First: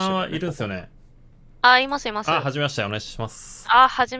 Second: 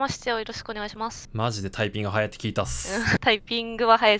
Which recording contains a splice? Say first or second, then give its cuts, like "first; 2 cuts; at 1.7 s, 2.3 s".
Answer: second; 2 cuts; at 1.2 s, 3.2 s